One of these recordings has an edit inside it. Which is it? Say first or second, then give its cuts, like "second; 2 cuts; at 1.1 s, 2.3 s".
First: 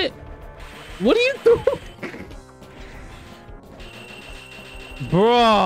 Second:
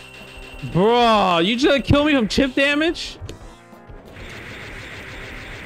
first; 1 cut; at 3.1 s